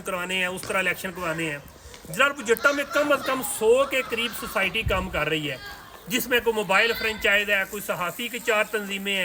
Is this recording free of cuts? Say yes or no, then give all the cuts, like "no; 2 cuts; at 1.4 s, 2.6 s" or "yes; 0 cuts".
yes; 0 cuts